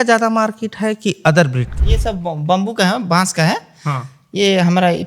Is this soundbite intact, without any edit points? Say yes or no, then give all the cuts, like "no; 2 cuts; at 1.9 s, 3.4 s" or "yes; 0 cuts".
no; 1 cut; at 1.8 s